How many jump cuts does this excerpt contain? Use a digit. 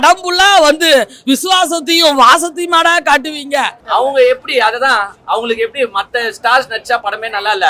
1